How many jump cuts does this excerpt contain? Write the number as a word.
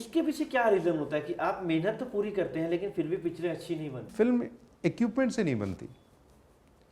one